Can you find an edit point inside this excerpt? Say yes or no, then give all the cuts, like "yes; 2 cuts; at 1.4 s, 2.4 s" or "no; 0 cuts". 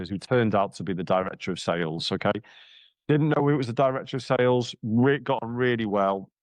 no; 0 cuts